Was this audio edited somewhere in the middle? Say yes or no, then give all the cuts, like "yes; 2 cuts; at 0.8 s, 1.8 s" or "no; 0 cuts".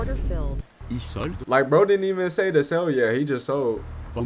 no; 0 cuts